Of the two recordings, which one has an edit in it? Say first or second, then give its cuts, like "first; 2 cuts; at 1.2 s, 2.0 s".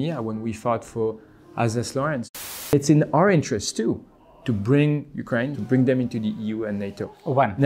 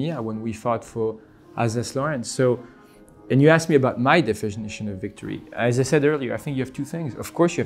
first; 2 cuts; at 2.3 s, 5.6 s